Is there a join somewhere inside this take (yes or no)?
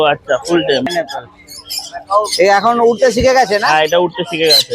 yes